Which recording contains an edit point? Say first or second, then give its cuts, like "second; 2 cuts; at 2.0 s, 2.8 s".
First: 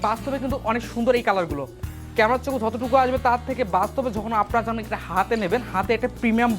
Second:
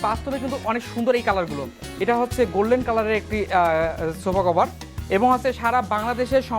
second; 2 cuts; at 1.8 s, 4.8 s